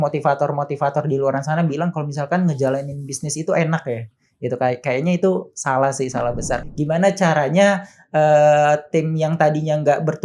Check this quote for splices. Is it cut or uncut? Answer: cut